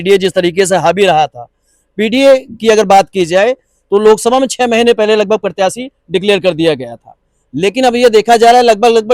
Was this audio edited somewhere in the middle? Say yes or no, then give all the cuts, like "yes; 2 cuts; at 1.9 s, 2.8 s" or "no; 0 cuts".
no; 0 cuts